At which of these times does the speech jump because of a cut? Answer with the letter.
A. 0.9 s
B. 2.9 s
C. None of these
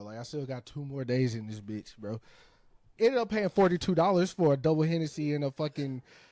B